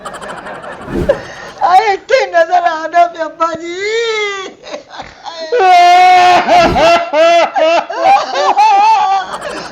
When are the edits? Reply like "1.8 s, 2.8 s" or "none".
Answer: 0.9 s